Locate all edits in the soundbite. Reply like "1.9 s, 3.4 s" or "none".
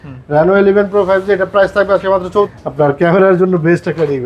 2.5 s